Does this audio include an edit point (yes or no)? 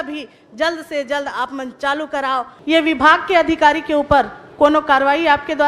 yes